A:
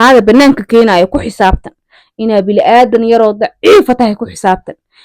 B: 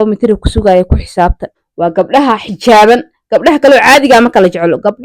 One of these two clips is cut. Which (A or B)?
B